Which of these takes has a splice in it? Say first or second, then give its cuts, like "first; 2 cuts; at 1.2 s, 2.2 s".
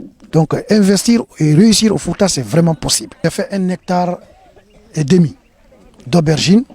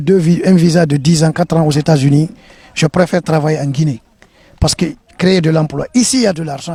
first; 1 cut; at 3.2 s